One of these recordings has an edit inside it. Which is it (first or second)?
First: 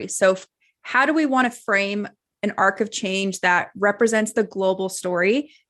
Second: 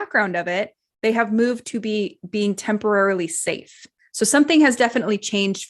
second